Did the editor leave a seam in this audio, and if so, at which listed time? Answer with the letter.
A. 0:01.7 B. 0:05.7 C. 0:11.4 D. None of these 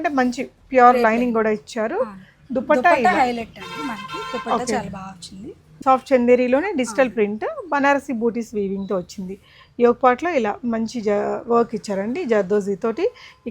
B